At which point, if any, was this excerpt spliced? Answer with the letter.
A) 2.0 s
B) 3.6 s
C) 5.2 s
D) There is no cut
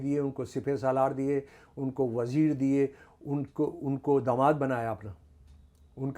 D